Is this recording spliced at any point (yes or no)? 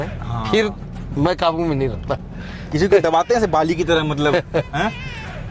yes